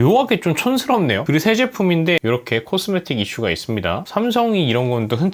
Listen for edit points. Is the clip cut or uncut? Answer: cut